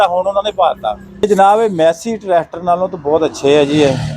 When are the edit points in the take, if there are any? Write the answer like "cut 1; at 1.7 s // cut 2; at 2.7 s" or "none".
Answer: cut 1; at 1.2 s